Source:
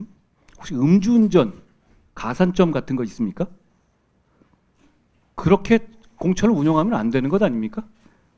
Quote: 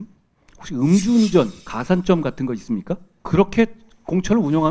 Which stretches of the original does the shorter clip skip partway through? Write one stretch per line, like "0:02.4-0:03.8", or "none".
0:01.7-0:02.2
0:03.6-0:05.3